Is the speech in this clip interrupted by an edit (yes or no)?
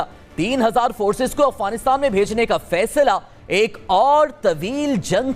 no